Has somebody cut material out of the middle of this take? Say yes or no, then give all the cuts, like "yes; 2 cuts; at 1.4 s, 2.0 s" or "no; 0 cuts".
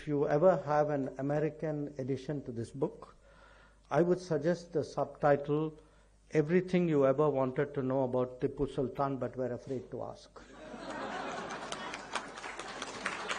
no; 0 cuts